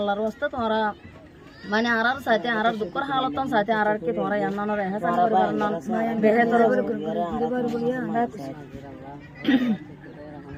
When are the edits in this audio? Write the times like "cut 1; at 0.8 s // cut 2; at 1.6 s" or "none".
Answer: none